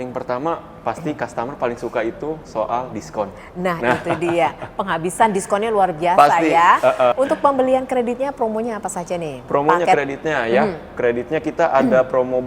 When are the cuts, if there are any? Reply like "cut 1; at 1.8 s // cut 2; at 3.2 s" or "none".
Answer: cut 1; at 7.1 s